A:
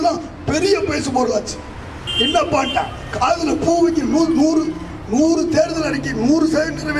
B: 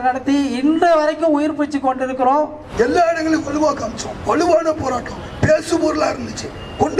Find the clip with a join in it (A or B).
B